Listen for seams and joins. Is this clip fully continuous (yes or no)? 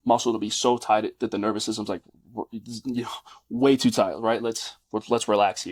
yes